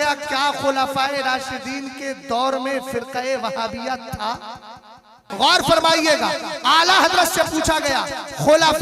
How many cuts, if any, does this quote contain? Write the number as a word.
one